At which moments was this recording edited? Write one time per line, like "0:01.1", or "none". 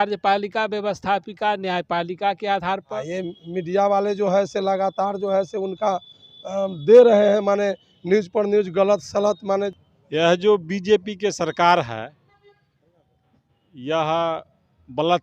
0:03.0
0:09.7